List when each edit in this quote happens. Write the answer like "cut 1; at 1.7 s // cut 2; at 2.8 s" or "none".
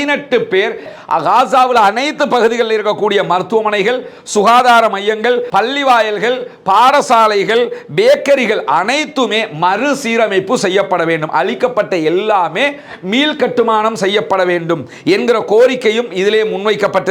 cut 1; at 0.9 s